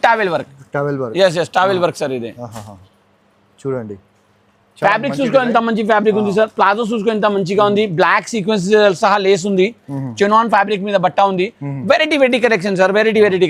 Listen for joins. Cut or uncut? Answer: uncut